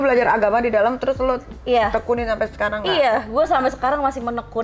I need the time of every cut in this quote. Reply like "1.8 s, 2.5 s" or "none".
none